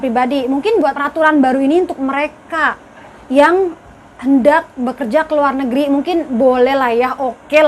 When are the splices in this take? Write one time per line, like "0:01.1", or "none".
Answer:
0:01.0